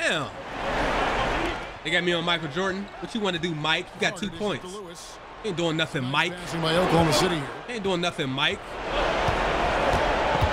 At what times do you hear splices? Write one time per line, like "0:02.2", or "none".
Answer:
none